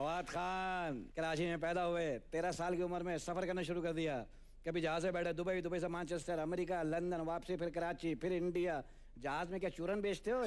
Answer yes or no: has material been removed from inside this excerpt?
yes